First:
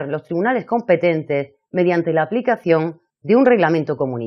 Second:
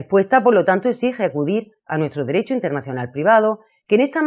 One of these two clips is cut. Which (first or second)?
first